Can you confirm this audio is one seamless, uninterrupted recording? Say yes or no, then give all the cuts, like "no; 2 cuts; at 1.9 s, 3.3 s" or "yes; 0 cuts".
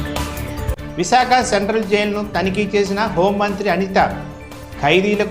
no; 1 cut; at 1.1 s